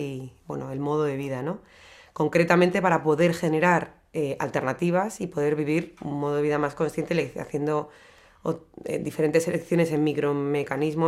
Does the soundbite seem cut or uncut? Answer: uncut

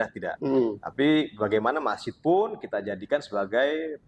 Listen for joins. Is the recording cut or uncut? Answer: uncut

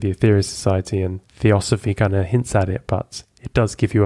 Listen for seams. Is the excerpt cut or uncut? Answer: cut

